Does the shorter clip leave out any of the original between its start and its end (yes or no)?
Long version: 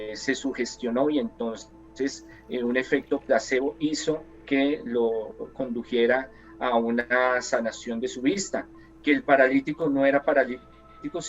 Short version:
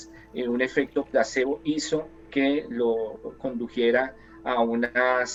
no